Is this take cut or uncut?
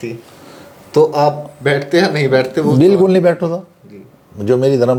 uncut